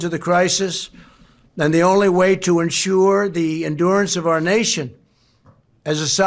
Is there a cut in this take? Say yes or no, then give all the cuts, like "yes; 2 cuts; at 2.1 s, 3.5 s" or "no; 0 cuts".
no; 0 cuts